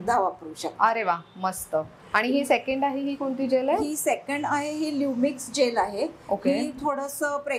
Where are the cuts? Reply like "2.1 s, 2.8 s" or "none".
none